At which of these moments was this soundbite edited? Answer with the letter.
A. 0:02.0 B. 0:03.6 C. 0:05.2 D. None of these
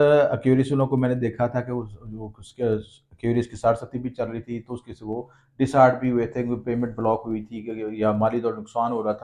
D